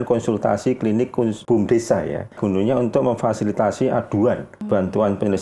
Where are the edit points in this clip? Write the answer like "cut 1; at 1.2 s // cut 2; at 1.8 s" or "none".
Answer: cut 1; at 1.4 s // cut 2; at 2.4 s // cut 3; at 4.5 s